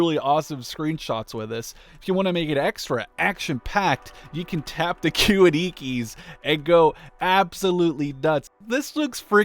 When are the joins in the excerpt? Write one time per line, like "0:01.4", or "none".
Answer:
0:01.9
0:08.6

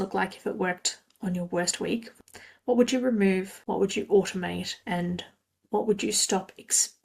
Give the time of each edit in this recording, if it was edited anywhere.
0:02.2
0:03.6
0:04.7

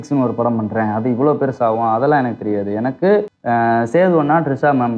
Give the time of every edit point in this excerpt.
0:03.3

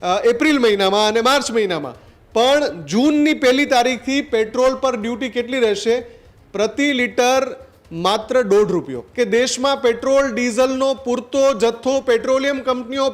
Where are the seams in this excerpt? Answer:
0:09.0

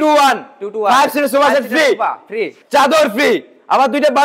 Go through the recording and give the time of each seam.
0:02.6

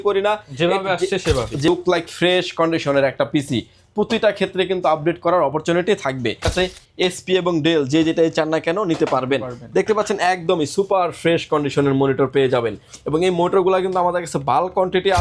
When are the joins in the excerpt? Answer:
0:01.7
0:06.5

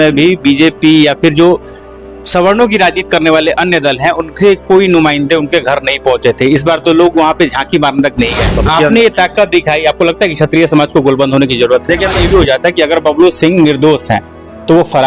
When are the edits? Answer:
0:08.5
0:12.2

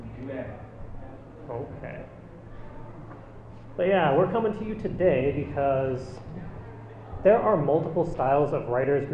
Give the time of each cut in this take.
0:05.7

